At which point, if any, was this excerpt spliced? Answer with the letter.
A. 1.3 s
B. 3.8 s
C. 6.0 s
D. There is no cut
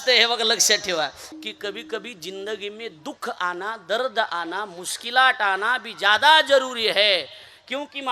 A